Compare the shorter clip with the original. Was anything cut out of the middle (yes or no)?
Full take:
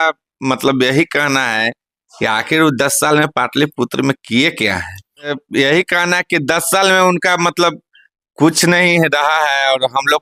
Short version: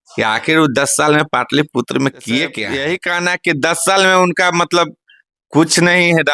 yes